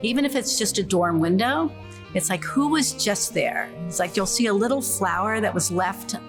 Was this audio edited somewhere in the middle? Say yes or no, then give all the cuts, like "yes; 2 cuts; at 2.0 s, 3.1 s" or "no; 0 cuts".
no; 0 cuts